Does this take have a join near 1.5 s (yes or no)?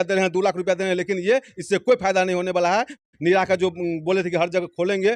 no